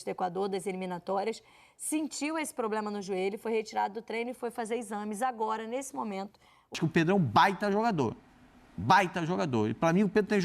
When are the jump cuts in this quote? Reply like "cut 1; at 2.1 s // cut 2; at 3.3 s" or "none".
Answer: cut 1; at 6.8 s

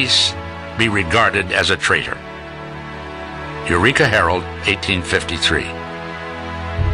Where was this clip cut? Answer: none

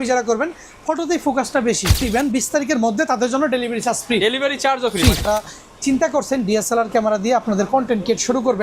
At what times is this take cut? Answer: cut 1; at 2.0 s // cut 2; at 5.2 s

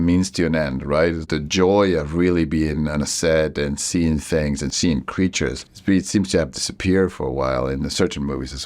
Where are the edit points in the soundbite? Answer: cut 1; at 1.2 s // cut 2; at 4.7 s // cut 3; at 5.7 s

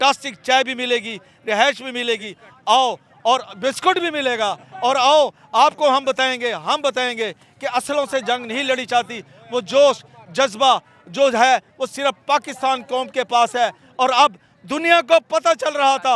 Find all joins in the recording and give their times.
none

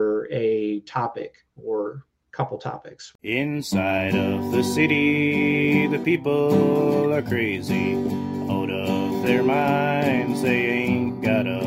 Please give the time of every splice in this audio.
cut 1; at 3.0 s

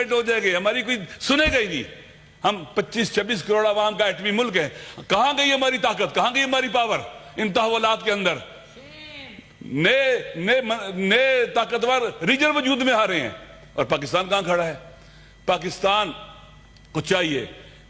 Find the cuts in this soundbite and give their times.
none

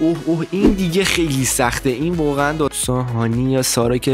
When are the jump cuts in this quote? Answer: cut 1; at 2.8 s

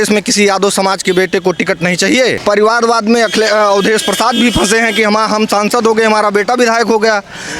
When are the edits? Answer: cut 1; at 2.4 s

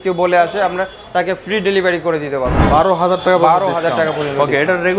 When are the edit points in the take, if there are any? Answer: cut 1; at 2.6 s

